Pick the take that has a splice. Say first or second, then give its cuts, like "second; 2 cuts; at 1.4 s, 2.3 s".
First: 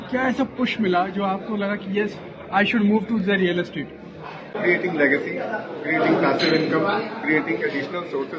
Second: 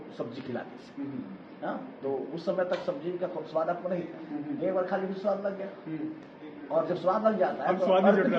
first; 1 cut; at 4.6 s